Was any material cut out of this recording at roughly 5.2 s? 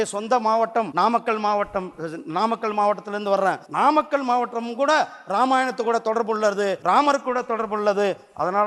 no; 3 cuts; at 0.9 s, 3.6 s, 6.8 s

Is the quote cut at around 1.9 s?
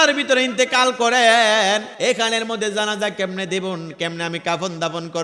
yes; 1 cut; at 1.9 s

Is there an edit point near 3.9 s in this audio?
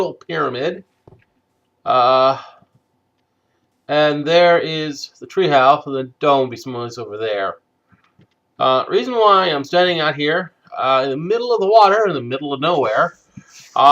yes; 1 cut; at 3.9 s

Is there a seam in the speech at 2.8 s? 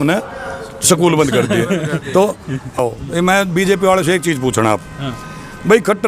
yes; 1 cut; at 2.8 s

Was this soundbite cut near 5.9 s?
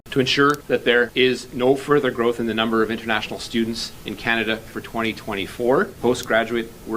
yes; 2 cuts; at 0.9 s, 5.9 s

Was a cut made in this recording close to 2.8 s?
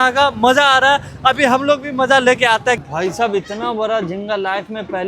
yes; 1 cut; at 2.8 s

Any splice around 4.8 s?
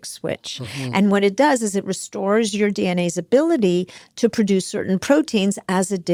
no; 0 cuts

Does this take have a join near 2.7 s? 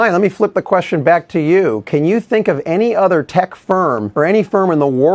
no; 1 cut; at 4.1 s

